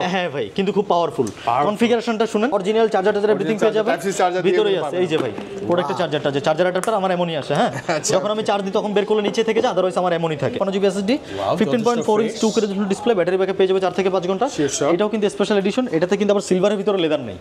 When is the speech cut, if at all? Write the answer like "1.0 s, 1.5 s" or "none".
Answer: 2.5 s, 10.6 s

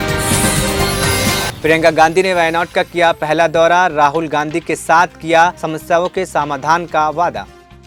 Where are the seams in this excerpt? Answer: none

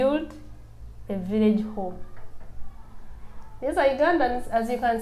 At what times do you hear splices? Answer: none

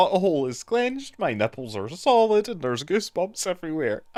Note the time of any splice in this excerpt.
none

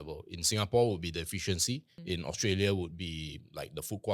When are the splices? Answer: 1.9 s

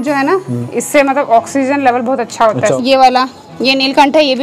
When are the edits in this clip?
2.7 s

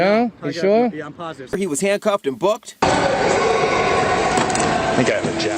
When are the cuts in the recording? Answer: 1.5 s

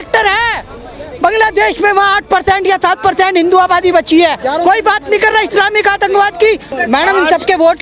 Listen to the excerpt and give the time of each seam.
6.7 s

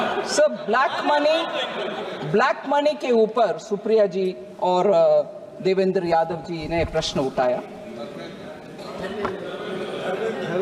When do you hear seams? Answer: none

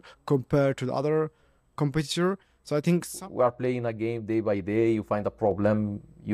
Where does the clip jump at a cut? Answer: 3.1 s

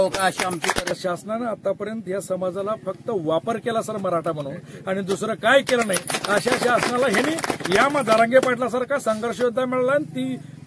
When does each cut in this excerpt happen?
0.9 s

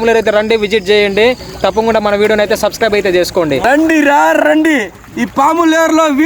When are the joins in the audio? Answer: 3.6 s

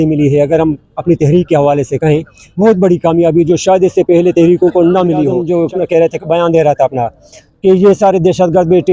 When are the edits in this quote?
5.4 s

